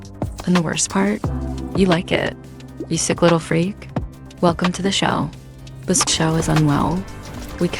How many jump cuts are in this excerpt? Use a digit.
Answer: 1